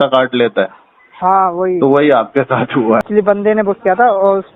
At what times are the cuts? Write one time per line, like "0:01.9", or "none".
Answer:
0:03.0